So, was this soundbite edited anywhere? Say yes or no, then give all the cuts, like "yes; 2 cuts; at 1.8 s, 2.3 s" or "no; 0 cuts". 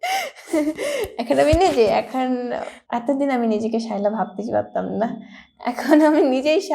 yes; 1 cut; at 2.7 s